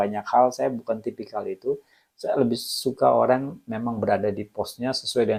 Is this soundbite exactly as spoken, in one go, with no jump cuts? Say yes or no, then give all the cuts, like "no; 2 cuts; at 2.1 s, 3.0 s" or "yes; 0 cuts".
yes; 0 cuts